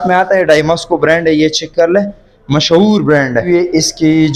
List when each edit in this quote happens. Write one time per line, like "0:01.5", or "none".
0:03.5